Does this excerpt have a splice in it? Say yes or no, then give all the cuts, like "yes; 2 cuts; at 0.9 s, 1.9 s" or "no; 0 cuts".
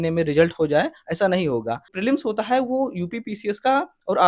yes; 1 cut; at 1.9 s